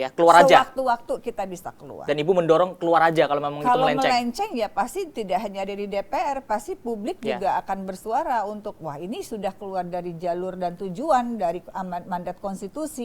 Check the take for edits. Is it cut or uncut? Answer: uncut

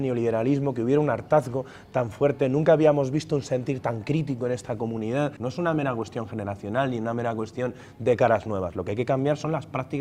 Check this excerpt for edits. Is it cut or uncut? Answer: cut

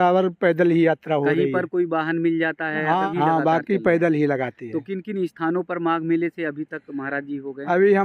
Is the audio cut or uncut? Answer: cut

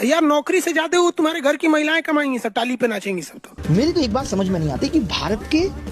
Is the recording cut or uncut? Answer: cut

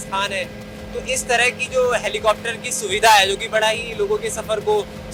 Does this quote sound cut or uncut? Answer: uncut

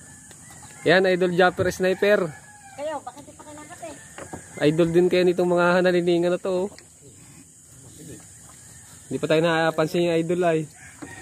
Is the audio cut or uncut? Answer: uncut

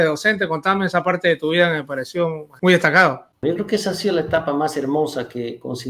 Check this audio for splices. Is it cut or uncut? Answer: cut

